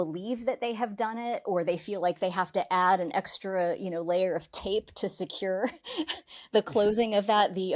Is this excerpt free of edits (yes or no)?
yes